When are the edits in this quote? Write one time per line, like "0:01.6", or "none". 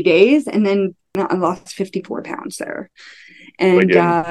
0:01.2